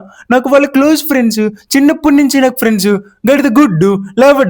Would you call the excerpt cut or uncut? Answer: uncut